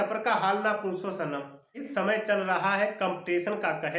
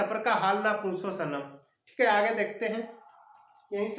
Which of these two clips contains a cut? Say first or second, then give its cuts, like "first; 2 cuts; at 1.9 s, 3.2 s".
first; 1 cut; at 1.8 s